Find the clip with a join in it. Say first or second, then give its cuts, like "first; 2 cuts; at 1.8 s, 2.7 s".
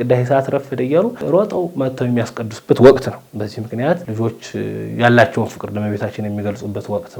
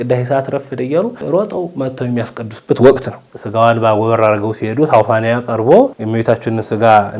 second; 1 cut; at 3.4 s